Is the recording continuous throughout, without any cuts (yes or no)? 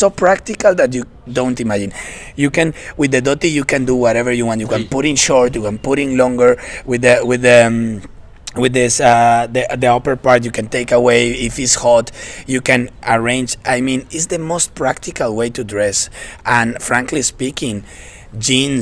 yes